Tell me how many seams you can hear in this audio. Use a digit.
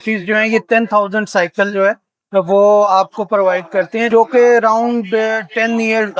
1